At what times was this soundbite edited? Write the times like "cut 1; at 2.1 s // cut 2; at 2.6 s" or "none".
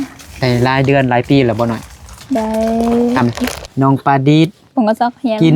cut 1; at 3.2 s